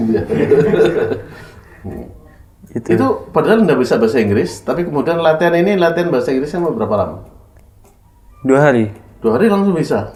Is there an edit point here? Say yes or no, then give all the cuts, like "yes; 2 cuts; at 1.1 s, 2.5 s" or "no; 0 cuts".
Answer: no; 0 cuts